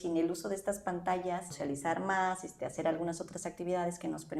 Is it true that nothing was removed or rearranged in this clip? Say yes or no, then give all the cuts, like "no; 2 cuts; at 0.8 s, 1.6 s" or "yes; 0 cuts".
no; 1 cut; at 1.5 s